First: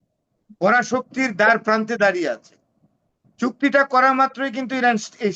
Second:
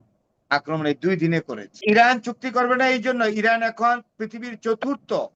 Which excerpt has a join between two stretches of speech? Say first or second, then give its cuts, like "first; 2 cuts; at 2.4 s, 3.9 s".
second; 1 cut; at 1.8 s